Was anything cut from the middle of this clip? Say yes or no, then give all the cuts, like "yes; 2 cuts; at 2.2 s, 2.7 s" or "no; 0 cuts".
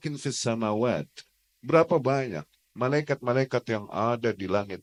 no; 0 cuts